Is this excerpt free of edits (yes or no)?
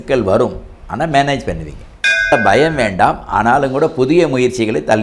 no